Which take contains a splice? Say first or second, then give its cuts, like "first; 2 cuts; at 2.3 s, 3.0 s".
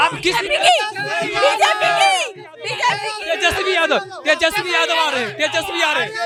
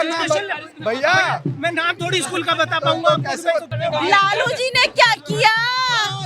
second; 1 cut; at 3.7 s